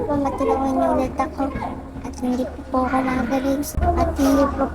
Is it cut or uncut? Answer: cut